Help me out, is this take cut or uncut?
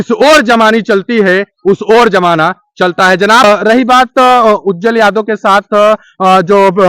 cut